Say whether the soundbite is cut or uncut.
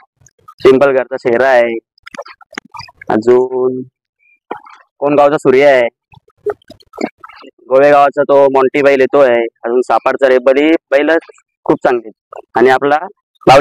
uncut